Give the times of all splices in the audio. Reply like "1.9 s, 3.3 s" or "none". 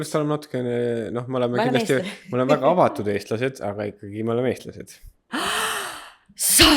5.3 s